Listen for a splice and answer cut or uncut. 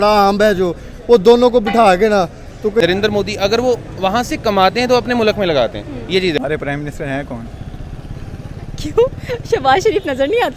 cut